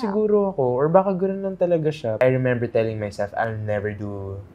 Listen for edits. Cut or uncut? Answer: cut